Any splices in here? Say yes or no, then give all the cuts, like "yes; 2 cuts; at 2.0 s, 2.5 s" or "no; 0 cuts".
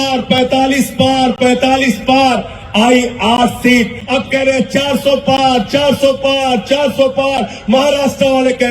yes; 1 cut; at 4.0 s